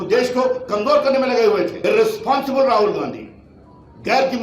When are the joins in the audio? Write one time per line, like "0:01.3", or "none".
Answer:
0:01.7